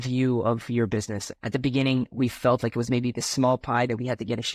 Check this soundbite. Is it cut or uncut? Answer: cut